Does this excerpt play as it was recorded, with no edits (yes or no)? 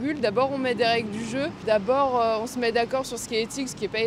no